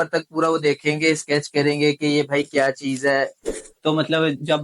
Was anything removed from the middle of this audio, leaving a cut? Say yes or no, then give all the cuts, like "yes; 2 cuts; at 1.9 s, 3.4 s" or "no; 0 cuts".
yes; 1 cut; at 3.5 s